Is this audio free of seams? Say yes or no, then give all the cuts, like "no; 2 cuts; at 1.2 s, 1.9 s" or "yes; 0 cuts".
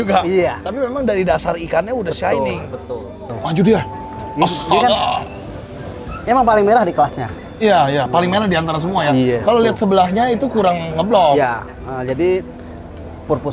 no; 1 cut; at 3.3 s